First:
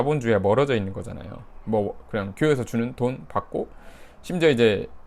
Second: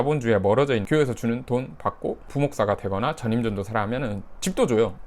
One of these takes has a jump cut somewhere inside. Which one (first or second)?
second